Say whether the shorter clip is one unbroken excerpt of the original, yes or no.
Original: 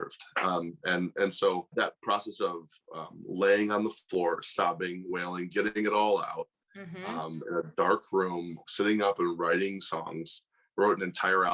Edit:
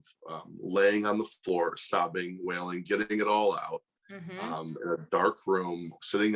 yes